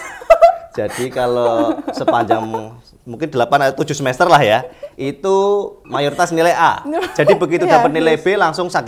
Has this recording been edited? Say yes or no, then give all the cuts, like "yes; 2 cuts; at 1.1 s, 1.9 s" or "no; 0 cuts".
yes; 1 cut; at 5.8 s